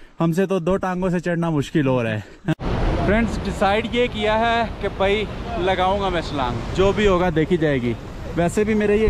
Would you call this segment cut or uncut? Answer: cut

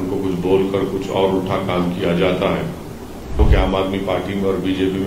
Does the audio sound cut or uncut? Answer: cut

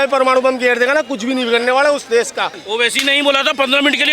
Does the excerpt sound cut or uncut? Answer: cut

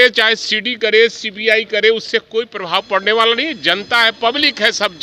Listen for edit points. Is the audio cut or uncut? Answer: uncut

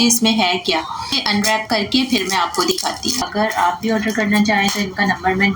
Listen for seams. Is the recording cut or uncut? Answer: cut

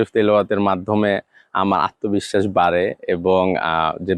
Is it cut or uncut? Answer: uncut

